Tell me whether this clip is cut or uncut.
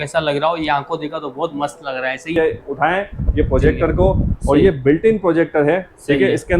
cut